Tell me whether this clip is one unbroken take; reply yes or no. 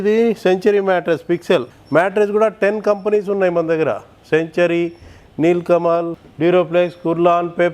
no